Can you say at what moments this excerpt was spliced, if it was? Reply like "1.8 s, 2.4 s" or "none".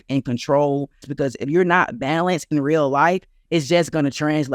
1.1 s